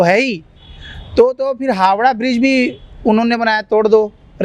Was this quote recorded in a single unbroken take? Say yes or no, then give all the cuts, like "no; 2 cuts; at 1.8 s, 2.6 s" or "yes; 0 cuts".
yes; 0 cuts